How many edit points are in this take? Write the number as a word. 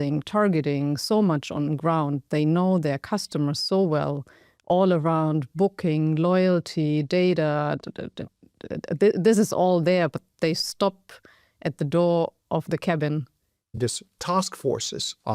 one